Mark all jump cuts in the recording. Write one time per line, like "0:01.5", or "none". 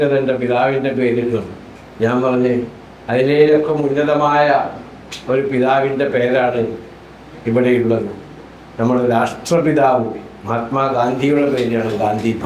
none